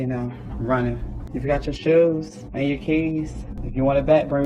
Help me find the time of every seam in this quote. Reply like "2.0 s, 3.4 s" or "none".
1.1 s